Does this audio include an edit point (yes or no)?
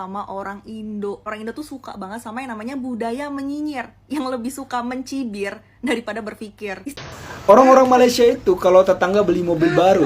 yes